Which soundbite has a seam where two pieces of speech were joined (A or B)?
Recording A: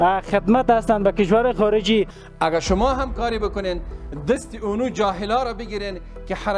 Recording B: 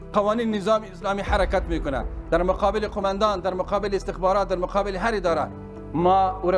A